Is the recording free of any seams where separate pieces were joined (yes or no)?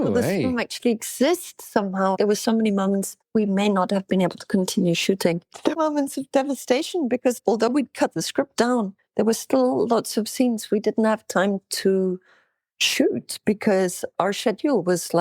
no